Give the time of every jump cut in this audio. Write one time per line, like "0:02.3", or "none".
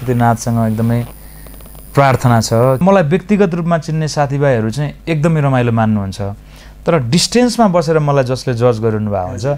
0:02.8